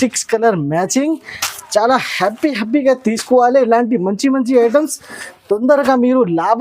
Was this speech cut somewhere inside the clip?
no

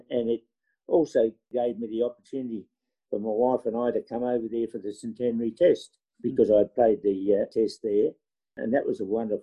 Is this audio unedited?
yes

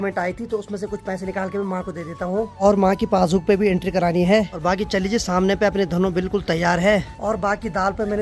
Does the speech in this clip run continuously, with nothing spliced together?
yes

